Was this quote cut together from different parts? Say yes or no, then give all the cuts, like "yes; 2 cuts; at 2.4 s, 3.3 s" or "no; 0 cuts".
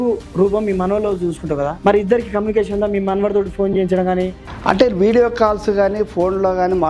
yes; 2 cuts; at 1.7 s, 4.4 s